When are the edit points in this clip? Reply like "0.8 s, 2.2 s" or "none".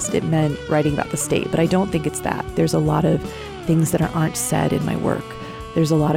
2.5 s